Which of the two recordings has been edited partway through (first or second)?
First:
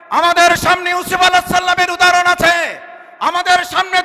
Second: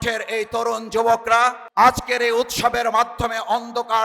second